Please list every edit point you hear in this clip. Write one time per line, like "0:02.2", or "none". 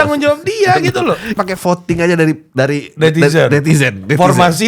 0:01.4